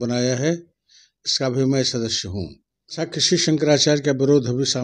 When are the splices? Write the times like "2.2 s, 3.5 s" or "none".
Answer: 3.0 s